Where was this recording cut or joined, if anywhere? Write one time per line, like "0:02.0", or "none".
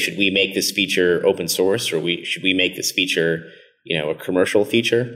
none